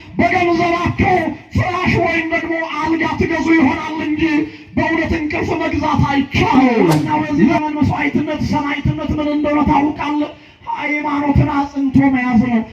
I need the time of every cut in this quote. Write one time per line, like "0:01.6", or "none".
0:07.6

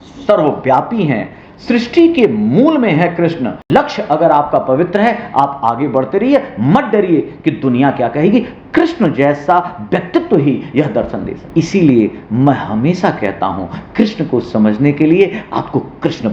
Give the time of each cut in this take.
0:03.6
0:11.5

